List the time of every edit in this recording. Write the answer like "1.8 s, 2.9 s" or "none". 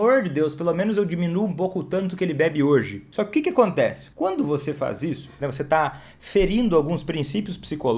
3.0 s, 4.0 s, 5.4 s